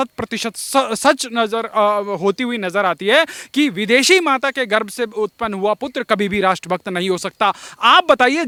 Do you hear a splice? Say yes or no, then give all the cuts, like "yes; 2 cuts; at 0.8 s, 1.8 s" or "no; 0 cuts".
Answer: no; 0 cuts